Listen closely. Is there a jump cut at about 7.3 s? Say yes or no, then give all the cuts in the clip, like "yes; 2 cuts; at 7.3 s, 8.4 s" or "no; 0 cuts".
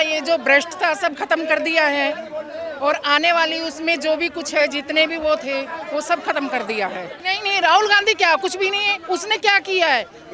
yes; 1 cut; at 7.3 s